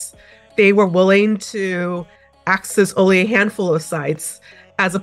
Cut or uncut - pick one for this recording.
uncut